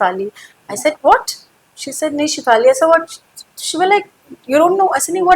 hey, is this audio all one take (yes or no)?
yes